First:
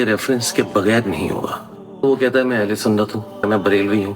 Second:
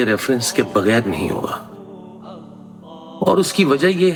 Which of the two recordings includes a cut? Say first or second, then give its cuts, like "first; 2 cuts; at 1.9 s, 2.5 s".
first; 2 cuts; at 2.0 s, 3.5 s